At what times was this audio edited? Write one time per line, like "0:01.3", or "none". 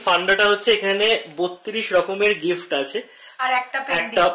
0:03.2